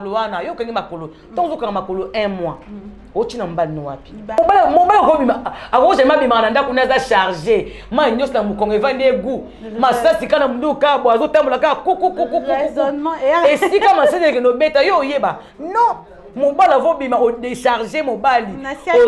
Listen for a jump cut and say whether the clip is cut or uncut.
cut